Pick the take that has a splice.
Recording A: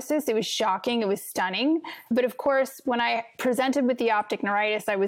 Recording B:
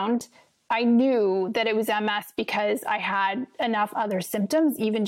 A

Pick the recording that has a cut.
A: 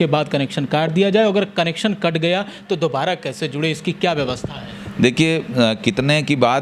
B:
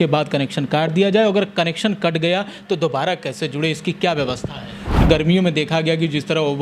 B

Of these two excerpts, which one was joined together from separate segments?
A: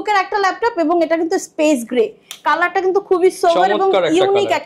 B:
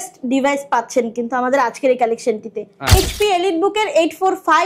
B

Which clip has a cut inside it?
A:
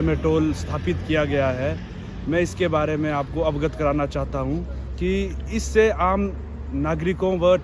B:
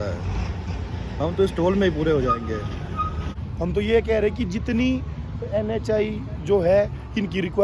B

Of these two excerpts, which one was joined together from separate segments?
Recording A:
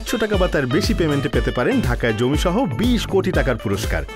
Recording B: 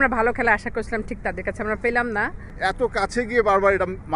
B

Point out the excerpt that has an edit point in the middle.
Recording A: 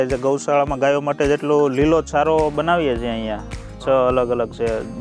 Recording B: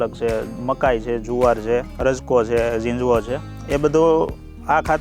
B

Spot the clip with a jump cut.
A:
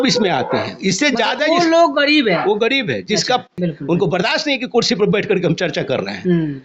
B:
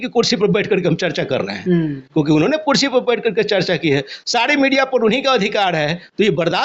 A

